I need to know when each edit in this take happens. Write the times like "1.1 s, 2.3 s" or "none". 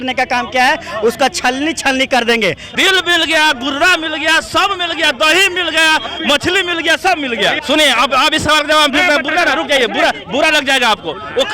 2.6 s, 7.6 s